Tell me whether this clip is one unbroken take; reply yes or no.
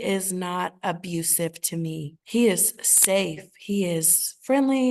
yes